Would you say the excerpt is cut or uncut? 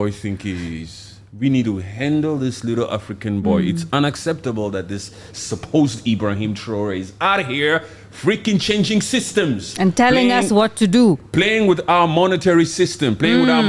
uncut